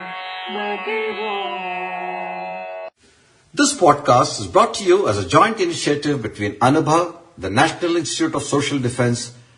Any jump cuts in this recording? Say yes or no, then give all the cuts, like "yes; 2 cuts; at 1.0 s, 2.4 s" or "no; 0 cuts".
yes; 1 cut; at 2.3 s